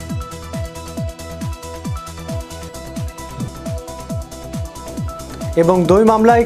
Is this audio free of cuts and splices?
yes; 0 cuts

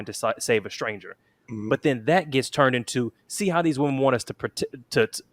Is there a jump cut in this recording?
no; 0 cuts

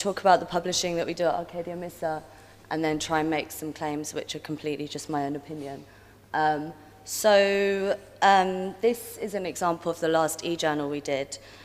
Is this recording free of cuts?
yes; 0 cuts

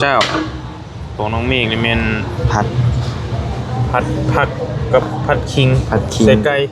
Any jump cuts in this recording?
no; 0 cuts

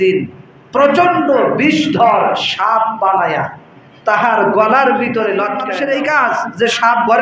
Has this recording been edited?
yes; 1 cut; at 5.6 s

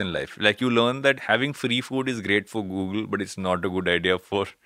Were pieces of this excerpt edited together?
yes; 1 cut; at 1.2 s

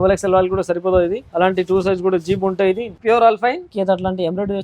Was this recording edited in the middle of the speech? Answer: yes; 3 cuts; at 1.2 s, 2.9 s, 3.7 s

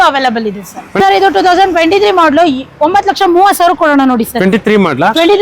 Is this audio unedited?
no; 1 cut; at 0.9 s

